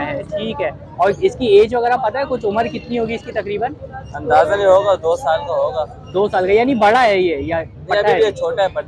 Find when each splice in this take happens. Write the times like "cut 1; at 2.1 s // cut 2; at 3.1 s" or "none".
none